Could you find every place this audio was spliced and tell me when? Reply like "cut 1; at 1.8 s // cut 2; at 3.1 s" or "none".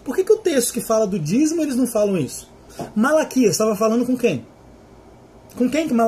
cut 1; at 2.8 s